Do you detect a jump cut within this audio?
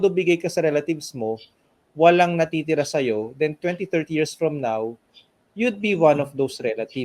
no; 0 cuts

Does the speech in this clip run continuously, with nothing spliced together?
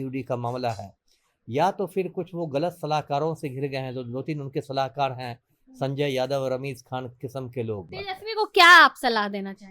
no; 1 cut; at 7.9 s

